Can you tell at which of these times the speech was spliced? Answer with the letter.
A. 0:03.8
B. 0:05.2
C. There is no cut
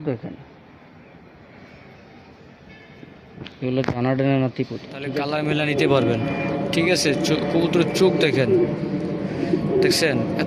B